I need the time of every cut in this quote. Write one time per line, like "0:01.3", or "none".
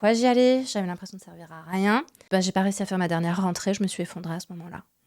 0:02.2